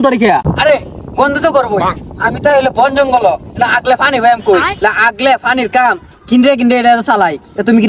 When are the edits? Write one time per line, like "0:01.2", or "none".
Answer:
none